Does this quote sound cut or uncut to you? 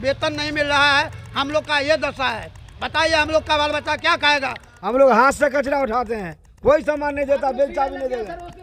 cut